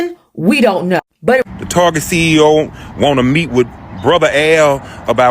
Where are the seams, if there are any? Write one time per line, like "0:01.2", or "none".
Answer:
0:01.4